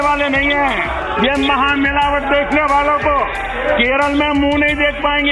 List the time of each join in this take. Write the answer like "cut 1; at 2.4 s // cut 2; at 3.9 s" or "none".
cut 1; at 0.9 s // cut 2; at 3.5 s

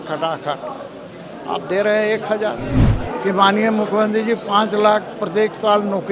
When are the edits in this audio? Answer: cut 1; at 2.9 s

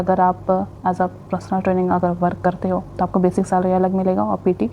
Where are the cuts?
none

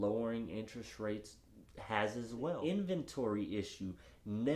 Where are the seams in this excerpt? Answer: cut 1; at 2.6 s

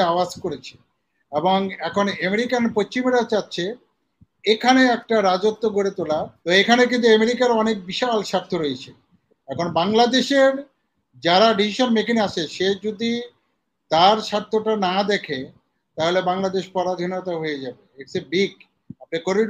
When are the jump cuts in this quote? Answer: cut 1; at 6.3 s

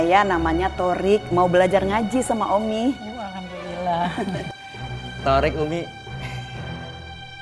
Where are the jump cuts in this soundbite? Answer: none

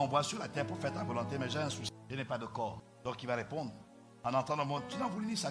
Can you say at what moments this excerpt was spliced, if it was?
none

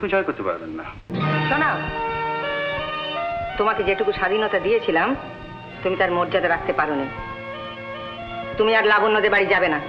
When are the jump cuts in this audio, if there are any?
cut 1; at 1.1 s

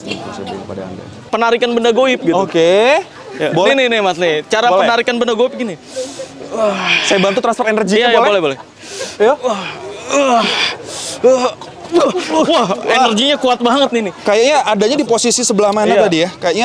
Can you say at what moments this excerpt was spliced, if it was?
cut 1; at 1.2 s

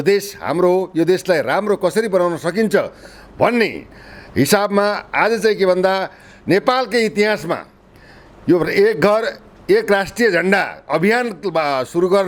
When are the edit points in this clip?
none

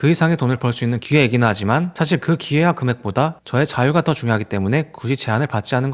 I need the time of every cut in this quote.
none

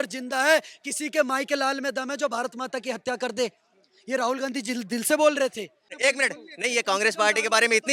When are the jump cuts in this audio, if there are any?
cut 1; at 5.9 s

